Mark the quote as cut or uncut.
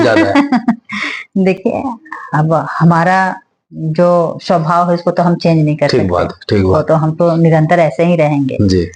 uncut